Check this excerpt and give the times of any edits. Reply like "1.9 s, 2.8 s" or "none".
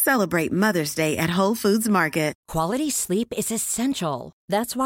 2.4 s